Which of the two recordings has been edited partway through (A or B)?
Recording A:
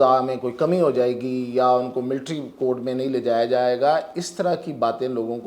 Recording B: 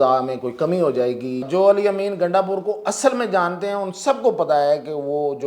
B